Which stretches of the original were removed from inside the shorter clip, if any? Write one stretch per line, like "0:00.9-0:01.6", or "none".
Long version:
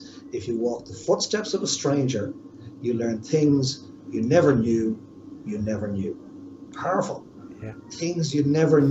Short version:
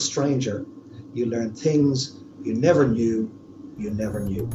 none